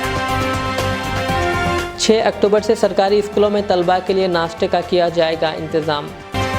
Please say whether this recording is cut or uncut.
uncut